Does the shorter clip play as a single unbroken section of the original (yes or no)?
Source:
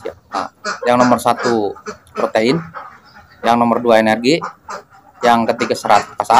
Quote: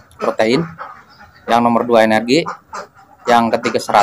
yes